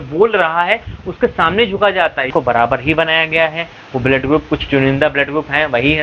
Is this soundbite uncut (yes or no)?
no